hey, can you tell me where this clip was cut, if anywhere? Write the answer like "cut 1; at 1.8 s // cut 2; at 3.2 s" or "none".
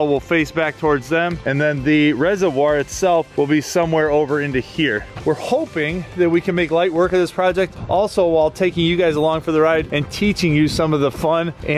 cut 1; at 5.1 s